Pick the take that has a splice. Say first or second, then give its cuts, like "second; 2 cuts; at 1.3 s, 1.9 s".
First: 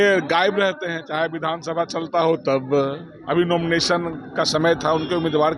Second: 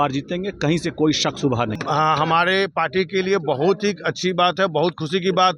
second; 1 cut; at 1.8 s